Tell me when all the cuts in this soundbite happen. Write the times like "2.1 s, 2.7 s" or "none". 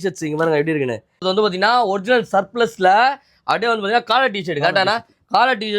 1.2 s